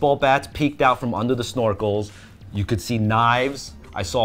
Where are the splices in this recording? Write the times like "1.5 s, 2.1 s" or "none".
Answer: none